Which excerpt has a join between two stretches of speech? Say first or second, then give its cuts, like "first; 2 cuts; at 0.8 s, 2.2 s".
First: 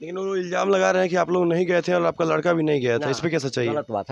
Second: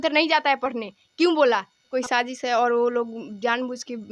second; 1 cut; at 1.9 s